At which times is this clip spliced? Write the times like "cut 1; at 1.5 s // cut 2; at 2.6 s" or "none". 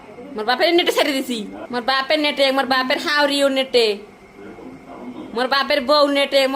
cut 1; at 1.6 s

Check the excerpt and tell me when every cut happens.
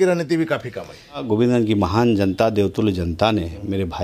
cut 1; at 1.2 s

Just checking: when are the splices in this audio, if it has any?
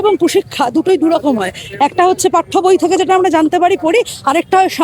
none

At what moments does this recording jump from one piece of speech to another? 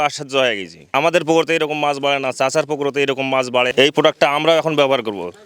cut 1; at 0.9 s

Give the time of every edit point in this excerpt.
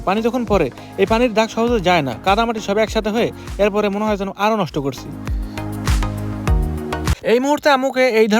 cut 1; at 7.1 s

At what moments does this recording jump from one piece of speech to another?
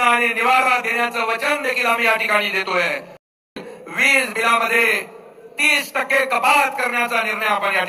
cut 1; at 3.5 s

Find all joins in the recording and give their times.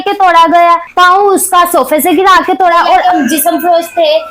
cut 1; at 3.0 s

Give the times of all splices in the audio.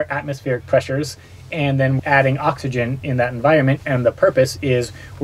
cut 1; at 2.0 s

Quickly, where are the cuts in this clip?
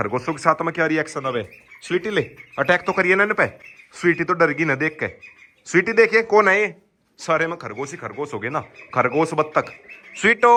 none

